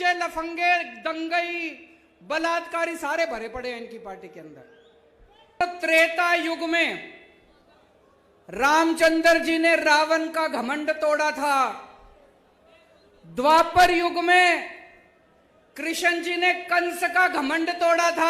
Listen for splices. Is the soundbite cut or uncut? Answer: cut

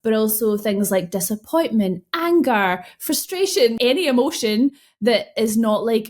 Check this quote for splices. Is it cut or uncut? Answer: cut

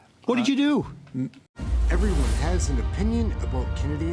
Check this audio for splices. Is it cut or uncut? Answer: cut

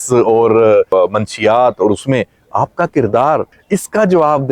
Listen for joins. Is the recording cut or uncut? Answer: cut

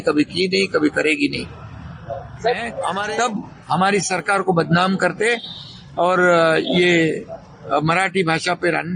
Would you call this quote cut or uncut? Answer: cut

